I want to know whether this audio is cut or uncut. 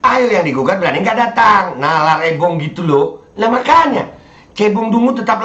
uncut